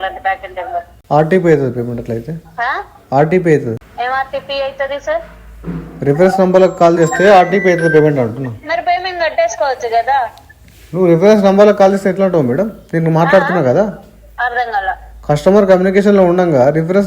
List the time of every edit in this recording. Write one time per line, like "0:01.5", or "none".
0:00.9
0:03.9